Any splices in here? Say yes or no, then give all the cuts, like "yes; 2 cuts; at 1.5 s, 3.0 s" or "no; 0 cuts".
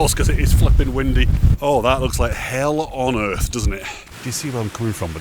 yes; 2 cuts; at 1.5 s, 4.0 s